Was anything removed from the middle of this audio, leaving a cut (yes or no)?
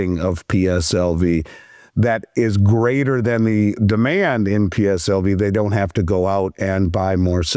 no